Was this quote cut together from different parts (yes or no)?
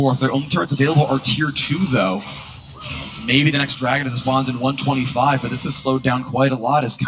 yes